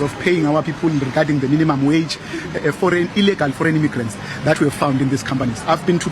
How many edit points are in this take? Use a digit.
1